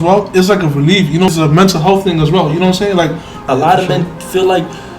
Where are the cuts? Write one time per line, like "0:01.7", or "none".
0:01.3
0:03.3